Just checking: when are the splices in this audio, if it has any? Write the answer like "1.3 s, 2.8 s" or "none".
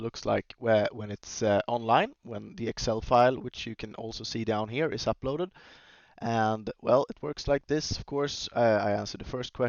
none